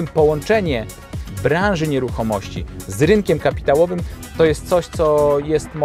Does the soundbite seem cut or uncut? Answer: uncut